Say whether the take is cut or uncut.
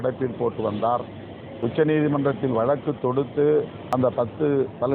cut